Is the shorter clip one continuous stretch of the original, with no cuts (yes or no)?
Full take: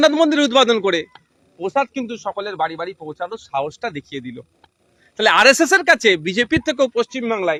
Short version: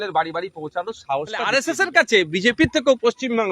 no